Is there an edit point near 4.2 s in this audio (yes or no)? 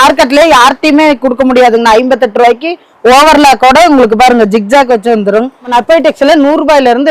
no